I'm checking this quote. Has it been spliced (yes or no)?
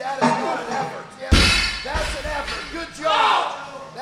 yes